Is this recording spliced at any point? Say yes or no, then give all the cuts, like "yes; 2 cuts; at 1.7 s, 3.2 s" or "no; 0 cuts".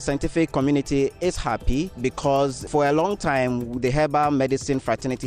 yes; 1 cut; at 1.9 s